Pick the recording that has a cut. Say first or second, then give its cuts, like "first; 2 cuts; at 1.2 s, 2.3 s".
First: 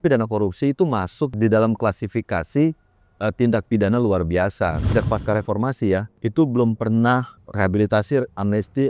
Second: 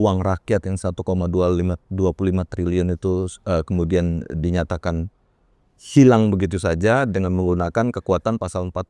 first; 4 cuts; at 1.3 s, 4.9 s, 6.2 s, 7.4 s